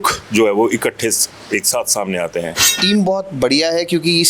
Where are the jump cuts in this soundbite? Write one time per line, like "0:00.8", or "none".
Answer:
0:02.8